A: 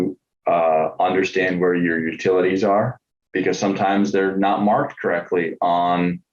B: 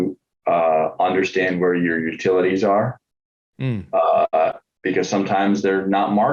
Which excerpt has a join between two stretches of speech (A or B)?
A